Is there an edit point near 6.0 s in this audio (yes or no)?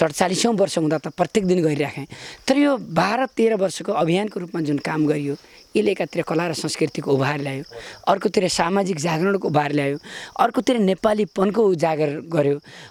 no